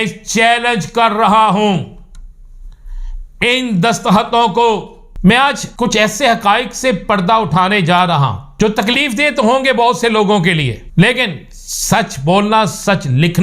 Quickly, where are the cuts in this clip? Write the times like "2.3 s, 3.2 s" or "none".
5.0 s, 5.6 s, 8.4 s, 10.8 s